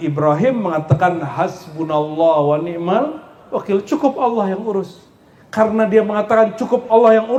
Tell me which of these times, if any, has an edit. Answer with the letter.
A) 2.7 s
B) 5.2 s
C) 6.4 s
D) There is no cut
D